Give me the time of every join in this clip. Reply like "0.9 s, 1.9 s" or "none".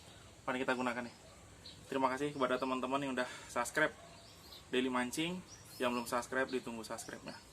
none